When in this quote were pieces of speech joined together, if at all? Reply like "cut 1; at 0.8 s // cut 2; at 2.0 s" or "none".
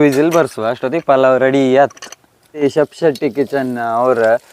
cut 1; at 2.6 s